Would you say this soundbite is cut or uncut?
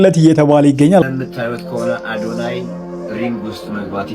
cut